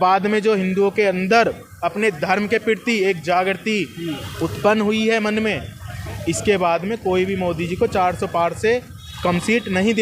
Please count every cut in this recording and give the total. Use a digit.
0